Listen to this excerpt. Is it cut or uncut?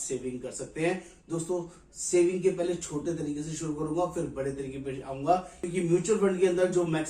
cut